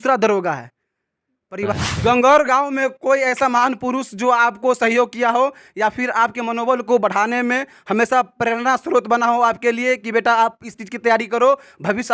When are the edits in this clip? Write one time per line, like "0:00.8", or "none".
0:01.7

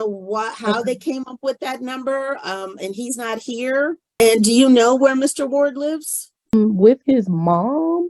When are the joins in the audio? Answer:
0:04.2
0:06.5

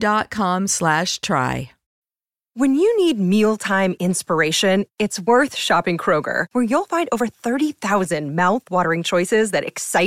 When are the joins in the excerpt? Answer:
0:01.8

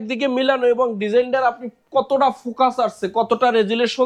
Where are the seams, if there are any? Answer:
none

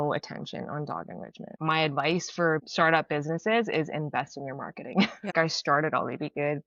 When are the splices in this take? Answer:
0:01.5
0:05.3

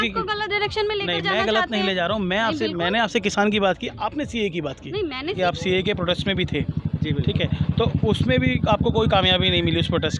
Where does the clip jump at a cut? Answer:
0:05.4

